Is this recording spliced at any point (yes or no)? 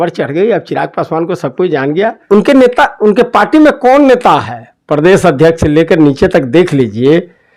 yes